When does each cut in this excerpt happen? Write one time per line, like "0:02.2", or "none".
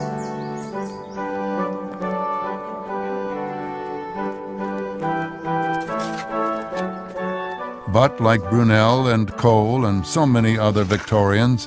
0:01.5